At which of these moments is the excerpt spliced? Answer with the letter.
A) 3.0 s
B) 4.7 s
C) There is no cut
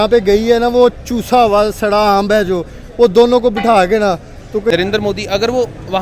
B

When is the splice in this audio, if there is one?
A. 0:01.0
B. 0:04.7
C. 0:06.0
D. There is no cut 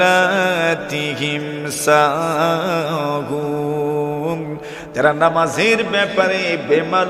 D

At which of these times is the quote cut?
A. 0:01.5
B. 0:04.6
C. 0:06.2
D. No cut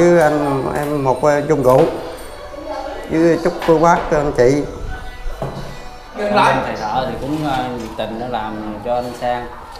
C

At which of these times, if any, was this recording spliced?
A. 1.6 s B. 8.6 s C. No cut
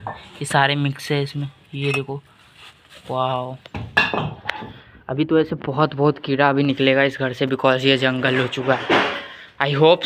C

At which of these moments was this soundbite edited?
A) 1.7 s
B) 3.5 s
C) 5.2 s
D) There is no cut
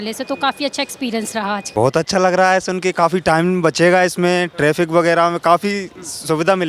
A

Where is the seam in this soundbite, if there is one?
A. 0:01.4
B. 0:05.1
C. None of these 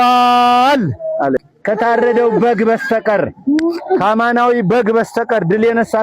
A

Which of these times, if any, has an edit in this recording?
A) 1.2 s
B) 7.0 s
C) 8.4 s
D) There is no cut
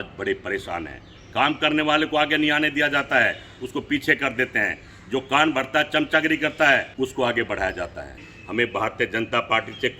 C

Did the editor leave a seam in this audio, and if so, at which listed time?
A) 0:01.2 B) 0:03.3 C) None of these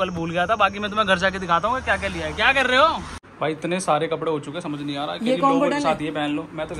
B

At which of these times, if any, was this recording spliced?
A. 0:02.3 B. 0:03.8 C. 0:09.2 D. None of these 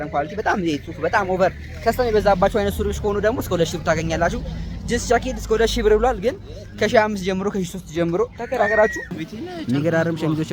C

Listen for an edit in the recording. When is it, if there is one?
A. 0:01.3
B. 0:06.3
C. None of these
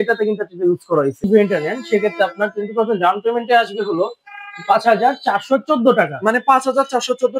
A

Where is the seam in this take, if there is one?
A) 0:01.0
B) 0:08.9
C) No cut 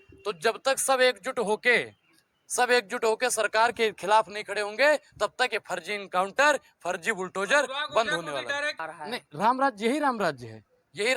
B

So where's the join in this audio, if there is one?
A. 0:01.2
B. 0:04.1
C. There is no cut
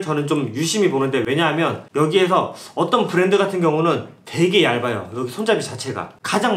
C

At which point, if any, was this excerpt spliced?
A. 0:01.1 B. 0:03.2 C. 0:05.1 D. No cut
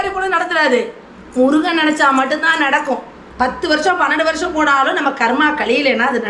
B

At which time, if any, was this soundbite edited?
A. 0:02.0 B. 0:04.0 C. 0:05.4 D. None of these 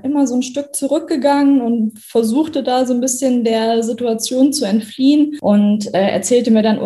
C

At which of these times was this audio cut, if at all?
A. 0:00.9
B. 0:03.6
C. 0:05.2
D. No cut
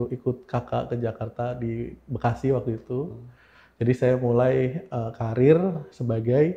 D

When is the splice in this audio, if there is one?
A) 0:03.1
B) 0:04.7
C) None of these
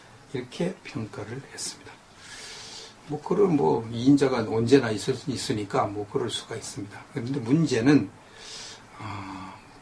B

